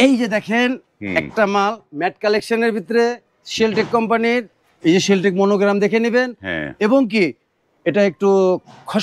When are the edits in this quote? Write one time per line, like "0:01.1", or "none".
none